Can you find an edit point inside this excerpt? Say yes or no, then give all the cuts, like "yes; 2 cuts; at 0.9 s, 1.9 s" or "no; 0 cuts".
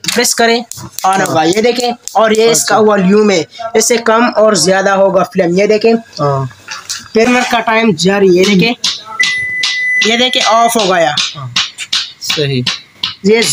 yes; 1 cut; at 7.3 s